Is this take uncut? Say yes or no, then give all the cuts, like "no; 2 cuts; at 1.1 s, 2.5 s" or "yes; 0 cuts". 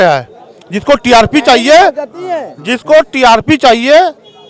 yes; 0 cuts